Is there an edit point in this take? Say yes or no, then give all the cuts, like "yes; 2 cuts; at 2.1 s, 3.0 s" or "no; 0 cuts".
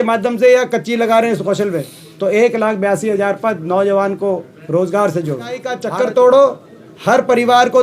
yes; 1 cut; at 5.8 s